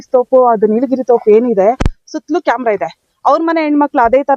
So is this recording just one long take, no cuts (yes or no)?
yes